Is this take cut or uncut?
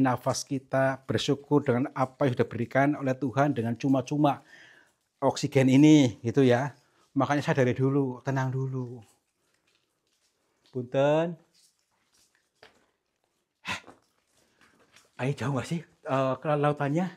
uncut